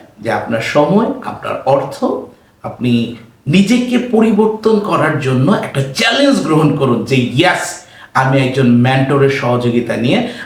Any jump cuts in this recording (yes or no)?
no